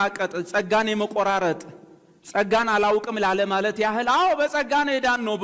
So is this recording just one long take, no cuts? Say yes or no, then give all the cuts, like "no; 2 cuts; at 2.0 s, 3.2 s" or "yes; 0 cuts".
yes; 0 cuts